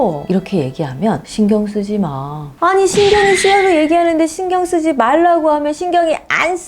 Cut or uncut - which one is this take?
cut